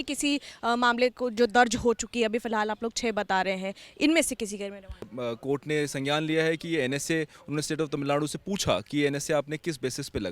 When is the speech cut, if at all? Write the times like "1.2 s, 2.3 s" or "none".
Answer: 5.1 s

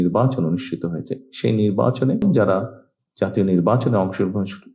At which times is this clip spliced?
2.2 s

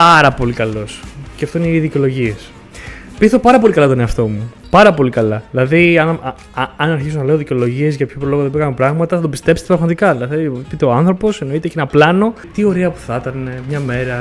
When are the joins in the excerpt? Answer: 12.5 s

